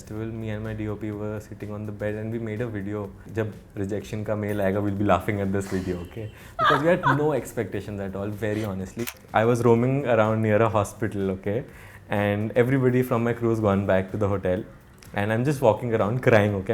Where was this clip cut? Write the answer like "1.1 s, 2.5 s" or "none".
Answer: 3.3 s, 9.0 s